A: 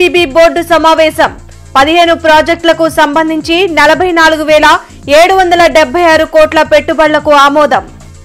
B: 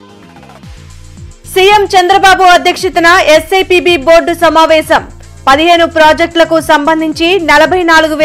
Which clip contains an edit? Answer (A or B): B